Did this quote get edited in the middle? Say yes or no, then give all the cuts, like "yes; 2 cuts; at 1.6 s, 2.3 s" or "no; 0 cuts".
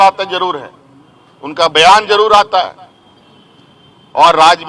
no; 0 cuts